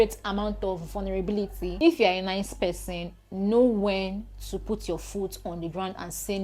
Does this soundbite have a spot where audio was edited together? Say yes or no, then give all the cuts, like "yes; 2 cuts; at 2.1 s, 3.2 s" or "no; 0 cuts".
yes; 1 cut; at 1.7 s